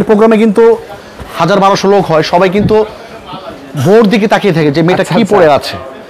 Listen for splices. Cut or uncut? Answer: uncut